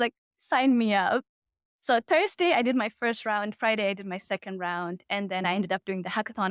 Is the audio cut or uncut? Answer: uncut